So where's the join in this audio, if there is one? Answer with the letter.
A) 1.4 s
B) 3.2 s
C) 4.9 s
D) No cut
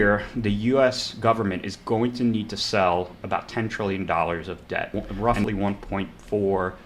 C